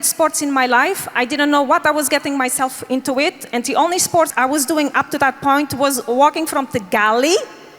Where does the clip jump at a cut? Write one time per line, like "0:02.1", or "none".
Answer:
0:04.3